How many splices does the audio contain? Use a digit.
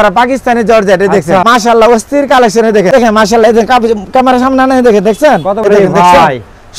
3